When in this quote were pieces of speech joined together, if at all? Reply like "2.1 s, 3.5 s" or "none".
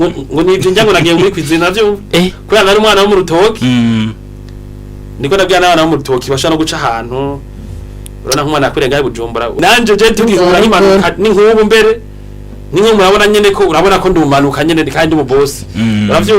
9.6 s

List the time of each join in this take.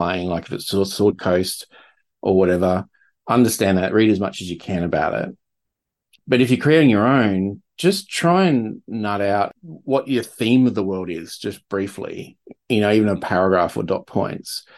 9.5 s

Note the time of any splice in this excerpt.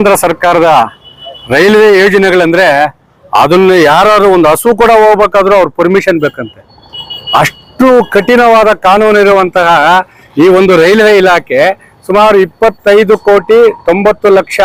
none

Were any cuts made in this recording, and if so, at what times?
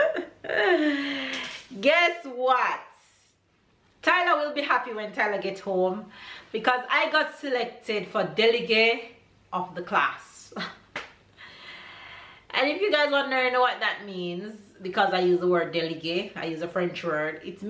none

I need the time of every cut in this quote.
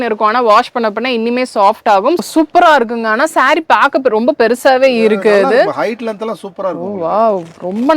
2.2 s

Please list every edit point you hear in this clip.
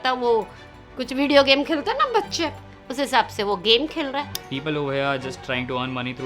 4.4 s

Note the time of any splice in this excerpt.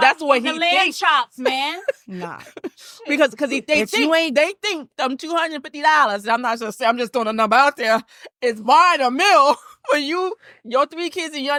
none

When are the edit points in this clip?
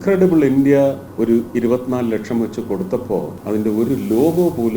1.1 s, 3.4 s

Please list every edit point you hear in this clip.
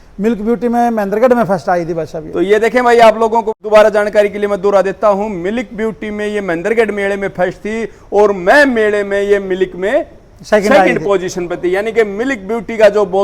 none

